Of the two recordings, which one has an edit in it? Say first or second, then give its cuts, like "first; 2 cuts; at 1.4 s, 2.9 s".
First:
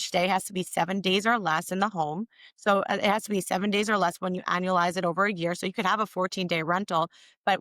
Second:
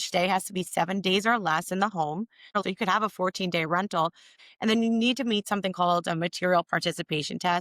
second; 2 cuts; at 2.6 s, 4.4 s